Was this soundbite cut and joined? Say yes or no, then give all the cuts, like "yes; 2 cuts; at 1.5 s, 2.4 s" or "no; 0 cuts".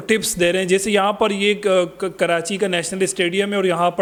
no; 0 cuts